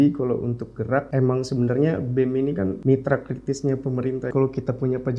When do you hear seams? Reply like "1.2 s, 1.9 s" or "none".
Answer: 1.1 s, 2.8 s, 4.3 s